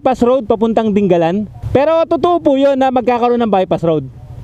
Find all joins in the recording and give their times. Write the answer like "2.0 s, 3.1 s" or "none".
1.6 s